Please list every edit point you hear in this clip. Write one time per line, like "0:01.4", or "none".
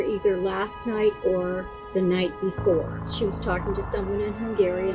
0:03.1